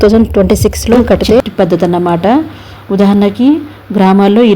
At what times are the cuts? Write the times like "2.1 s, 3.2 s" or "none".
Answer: 1.4 s

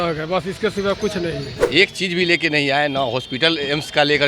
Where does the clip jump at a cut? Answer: 1.5 s

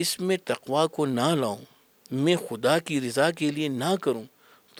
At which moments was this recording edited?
none

